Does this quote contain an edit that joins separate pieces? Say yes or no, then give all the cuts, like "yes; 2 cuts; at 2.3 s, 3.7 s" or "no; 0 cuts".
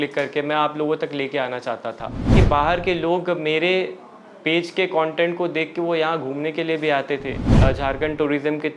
yes; 2 cuts; at 2.3 s, 7.5 s